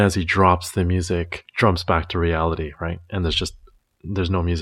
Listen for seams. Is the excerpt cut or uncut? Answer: cut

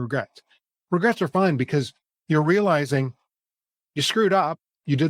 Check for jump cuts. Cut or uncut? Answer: uncut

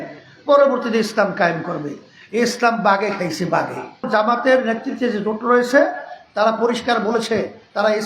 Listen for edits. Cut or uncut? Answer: cut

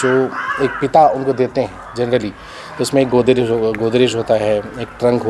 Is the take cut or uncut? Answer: uncut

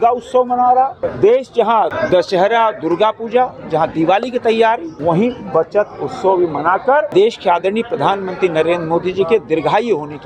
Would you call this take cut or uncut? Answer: cut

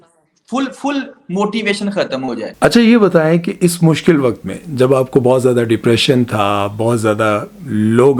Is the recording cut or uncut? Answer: cut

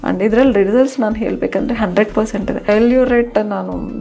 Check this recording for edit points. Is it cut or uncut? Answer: cut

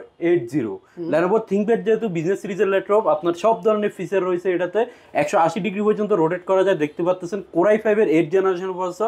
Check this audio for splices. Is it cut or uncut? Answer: uncut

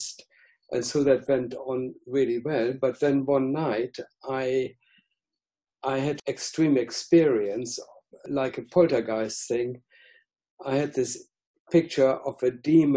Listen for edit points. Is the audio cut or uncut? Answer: cut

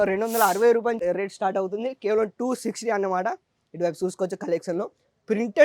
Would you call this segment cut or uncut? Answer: cut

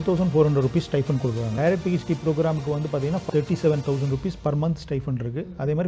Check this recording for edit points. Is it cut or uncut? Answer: cut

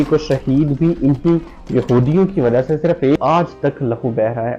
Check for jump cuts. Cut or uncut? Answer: cut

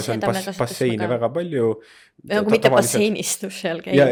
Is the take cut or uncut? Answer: uncut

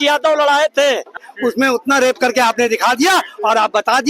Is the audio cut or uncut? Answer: cut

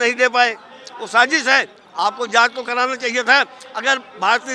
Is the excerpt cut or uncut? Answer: uncut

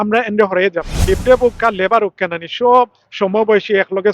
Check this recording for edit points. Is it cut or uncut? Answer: cut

